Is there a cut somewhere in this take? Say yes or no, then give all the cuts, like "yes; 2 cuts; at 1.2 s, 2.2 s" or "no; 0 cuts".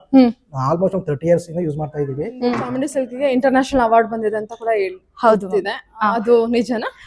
yes; 1 cut; at 2.7 s